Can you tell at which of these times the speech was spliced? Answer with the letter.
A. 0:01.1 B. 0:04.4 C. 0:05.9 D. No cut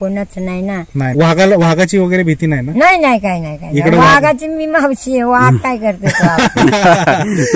A